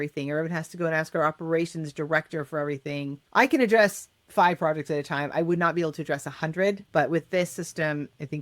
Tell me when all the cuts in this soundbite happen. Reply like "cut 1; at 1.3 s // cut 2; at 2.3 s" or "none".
cut 1; at 3.2 s // cut 2; at 6.8 s